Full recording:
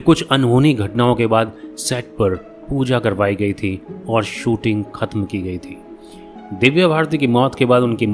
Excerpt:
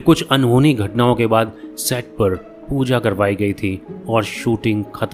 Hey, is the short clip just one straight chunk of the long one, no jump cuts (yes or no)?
yes